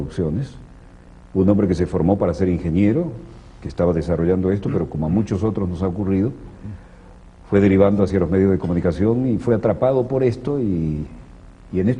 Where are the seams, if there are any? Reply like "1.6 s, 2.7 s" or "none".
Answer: 5.4 s